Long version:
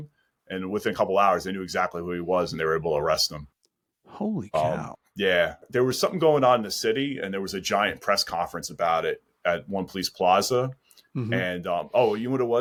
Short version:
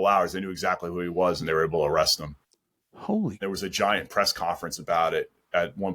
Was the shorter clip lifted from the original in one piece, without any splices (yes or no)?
no